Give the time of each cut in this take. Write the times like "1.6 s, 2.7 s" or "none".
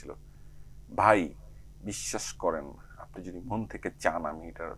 none